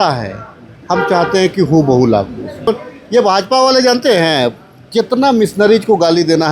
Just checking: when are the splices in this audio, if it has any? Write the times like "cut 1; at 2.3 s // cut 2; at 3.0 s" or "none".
cut 1; at 2.7 s

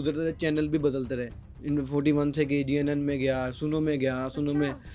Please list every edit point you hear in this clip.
none

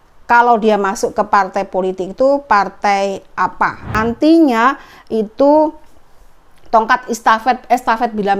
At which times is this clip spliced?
cut 1; at 3.9 s

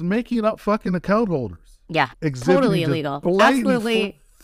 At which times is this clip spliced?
cut 1; at 2.1 s

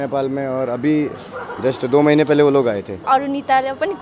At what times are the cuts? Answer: cut 1; at 3.0 s

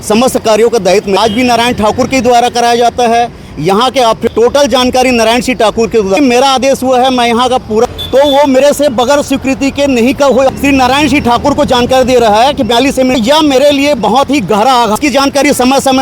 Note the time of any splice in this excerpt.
cut 1; at 1.2 s // cut 2; at 4.2 s // cut 3; at 6.2 s // cut 4; at 7.9 s // cut 5; at 10.5 s // cut 6; at 13.2 s // cut 7; at 15.0 s

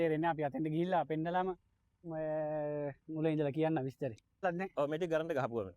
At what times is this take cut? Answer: cut 1; at 4.4 s

